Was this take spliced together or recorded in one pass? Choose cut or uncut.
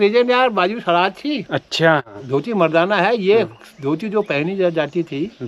cut